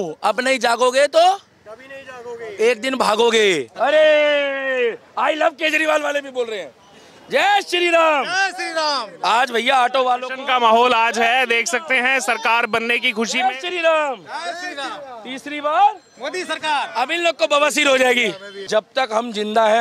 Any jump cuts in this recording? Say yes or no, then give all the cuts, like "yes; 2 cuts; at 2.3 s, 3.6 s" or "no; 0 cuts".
yes; 2 cuts; at 3.7 s, 18.7 s